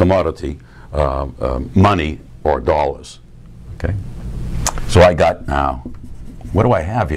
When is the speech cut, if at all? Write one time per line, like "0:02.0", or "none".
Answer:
none